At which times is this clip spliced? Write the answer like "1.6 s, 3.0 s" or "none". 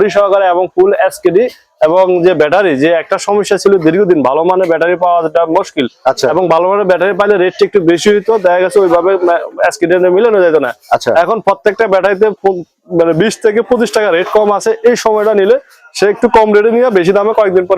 none